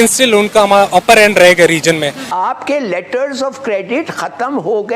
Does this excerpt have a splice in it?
yes; 1 cut; at 2.2 s

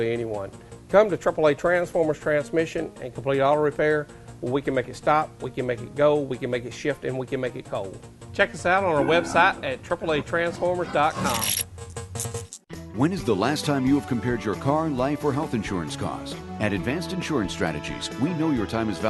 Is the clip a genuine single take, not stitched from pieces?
no; 1 cut; at 12.5 s

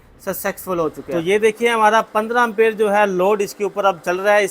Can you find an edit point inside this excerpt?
yes; 1 cut; at 1.0 s

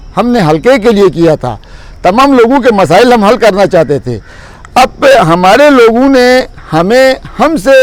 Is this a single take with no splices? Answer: yes; 0 cuts

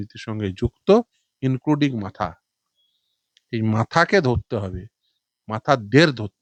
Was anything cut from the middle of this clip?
no; 0 cuts

